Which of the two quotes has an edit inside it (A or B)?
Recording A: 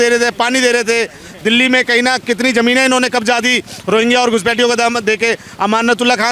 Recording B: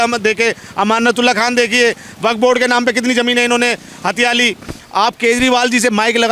B